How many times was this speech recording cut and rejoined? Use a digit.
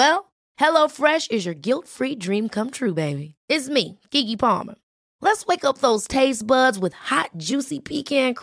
0